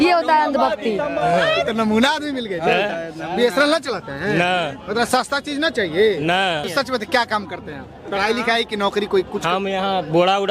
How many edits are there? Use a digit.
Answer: 2